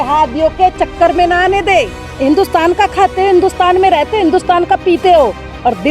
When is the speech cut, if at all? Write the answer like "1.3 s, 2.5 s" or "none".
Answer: 2.0 s